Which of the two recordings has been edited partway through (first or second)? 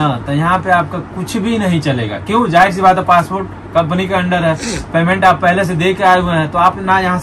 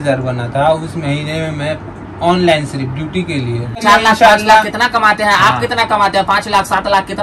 second